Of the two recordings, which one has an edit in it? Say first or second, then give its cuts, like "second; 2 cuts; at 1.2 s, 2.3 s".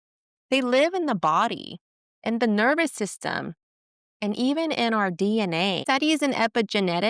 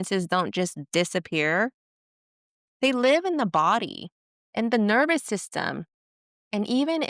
first; 1 cut; at 5.8 s